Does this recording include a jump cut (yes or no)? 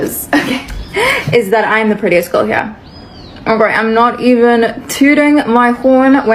no